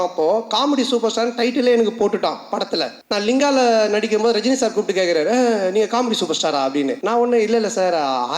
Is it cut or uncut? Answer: cut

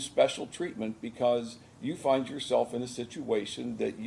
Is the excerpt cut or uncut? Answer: uncut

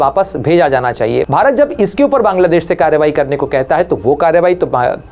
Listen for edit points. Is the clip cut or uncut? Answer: cut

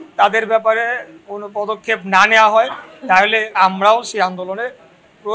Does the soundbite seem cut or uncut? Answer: cut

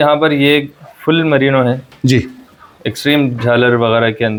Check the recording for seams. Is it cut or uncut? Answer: uncut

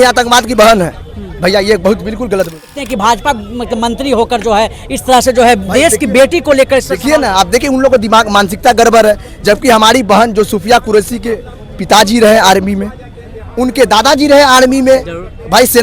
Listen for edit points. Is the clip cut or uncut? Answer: cut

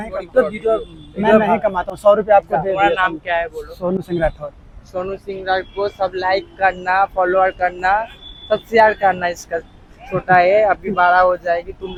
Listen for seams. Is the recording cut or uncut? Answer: uncut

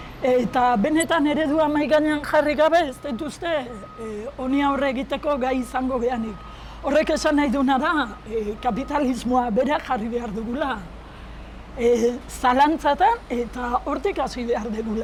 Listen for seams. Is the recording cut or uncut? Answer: uncut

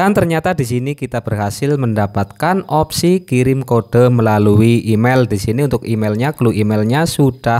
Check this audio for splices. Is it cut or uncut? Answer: uncut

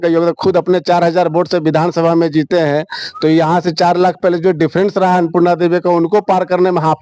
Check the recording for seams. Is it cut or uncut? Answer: uncut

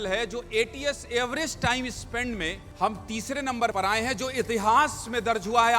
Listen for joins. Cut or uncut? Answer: cut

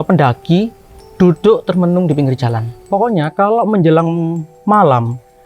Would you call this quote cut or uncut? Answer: cut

